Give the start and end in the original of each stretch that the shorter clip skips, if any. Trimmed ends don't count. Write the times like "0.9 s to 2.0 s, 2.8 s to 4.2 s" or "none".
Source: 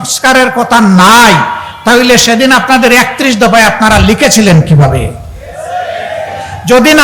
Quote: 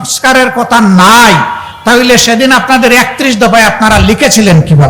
none